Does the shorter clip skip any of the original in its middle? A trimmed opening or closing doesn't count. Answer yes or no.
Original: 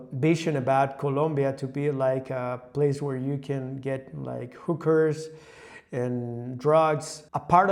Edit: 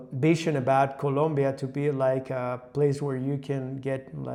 no